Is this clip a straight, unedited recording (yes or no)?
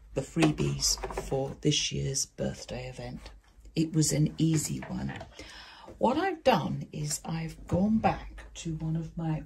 yes